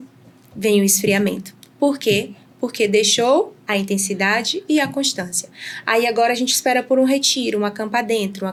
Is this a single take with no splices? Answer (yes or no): yes